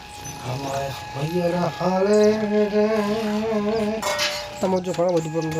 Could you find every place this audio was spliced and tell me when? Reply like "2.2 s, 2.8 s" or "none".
4.6 s